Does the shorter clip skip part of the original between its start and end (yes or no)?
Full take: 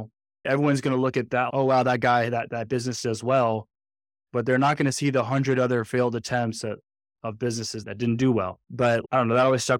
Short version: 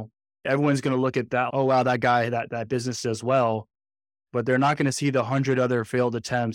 no